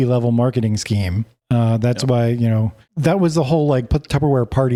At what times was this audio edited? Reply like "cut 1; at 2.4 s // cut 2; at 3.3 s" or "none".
none